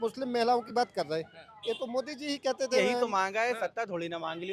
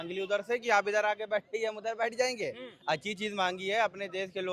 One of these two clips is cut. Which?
first; 1 cut; at 3.0 s

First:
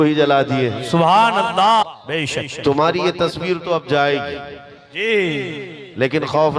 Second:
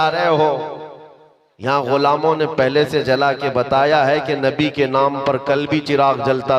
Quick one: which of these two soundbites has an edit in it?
first; 1 cut; at 1.6 s

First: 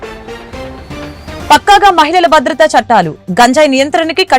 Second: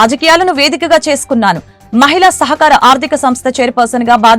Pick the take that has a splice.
first; 1 cut; at 1.4 s

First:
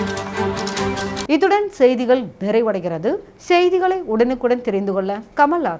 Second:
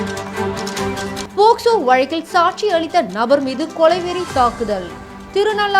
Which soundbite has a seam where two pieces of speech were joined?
second; 1 cut; at 1.2 s

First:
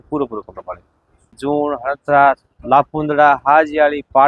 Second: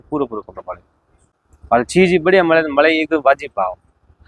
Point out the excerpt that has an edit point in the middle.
first; 1 cut; at 1.4 s

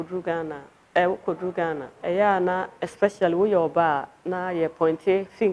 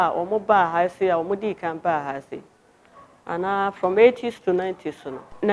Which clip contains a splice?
first; 1 cut; at 1.9 s

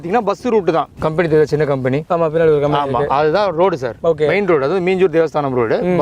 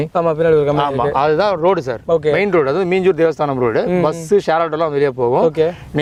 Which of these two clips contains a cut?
first; 1 cut; at 0.9 s

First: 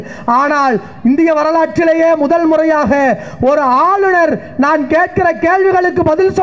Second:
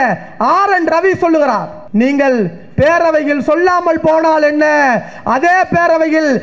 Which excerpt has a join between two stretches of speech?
second; 1 cut; at 1.8 s

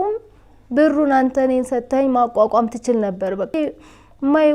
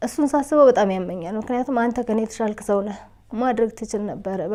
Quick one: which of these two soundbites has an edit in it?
first; 1 cut; at 3.4 s

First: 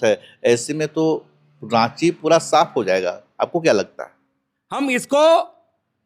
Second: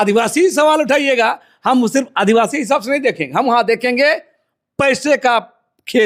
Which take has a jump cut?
first; 1 cut; at 4.9 s

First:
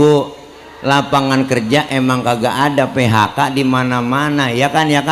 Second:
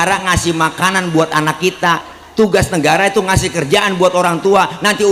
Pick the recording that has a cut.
second; 1 cut; at 2.1 s

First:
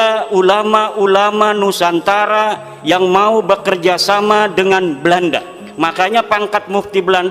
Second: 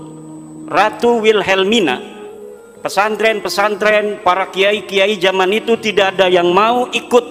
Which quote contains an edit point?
first; 1 cut; at 5.6 s

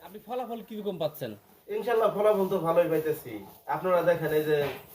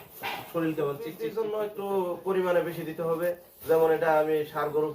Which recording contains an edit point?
second; 1 cut; at 1.2 s

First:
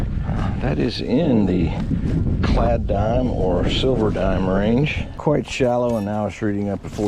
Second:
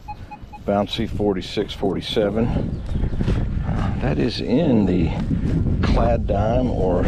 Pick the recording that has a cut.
first; 1 cut; at 5.1 s

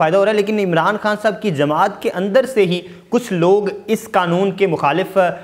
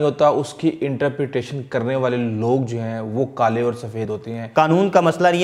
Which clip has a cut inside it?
second; 1 cut; at 4.4 s

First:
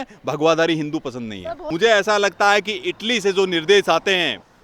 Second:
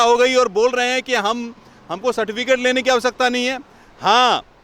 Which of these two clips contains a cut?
first; 1 cut; at 1.7 s

